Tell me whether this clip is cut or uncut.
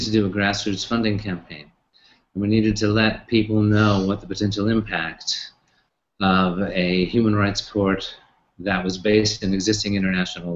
cut